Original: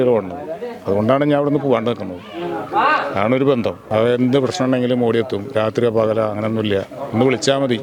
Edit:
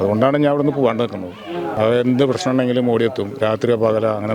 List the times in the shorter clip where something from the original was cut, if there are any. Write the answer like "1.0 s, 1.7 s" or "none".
1.7 s